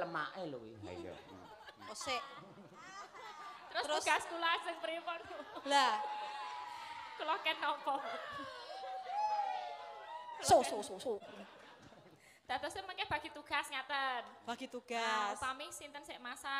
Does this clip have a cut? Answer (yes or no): yes